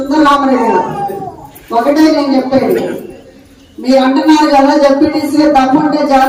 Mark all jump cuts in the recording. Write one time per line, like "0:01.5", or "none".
none